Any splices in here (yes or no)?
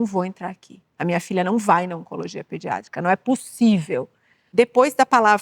yes